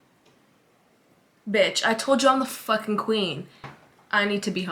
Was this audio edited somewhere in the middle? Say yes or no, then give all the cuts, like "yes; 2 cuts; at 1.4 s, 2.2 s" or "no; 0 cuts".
no; 0 cuts